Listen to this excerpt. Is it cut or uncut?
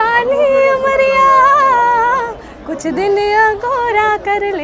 uncut